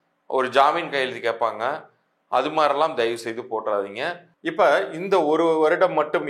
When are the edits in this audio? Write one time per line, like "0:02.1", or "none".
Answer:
0:04.3

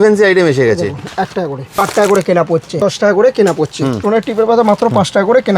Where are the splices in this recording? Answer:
0:01.8
0:02.8
0:04.0

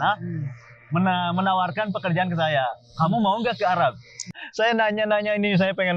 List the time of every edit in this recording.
0:04.4

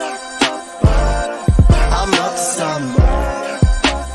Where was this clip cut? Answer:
none

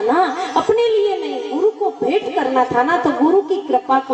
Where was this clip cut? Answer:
none

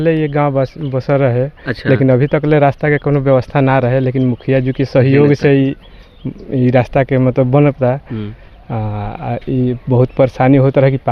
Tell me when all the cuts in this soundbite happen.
none

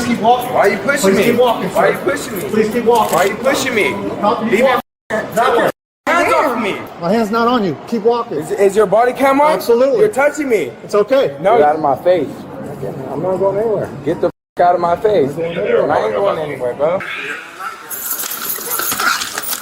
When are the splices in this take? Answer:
0:11.3
0:17.2

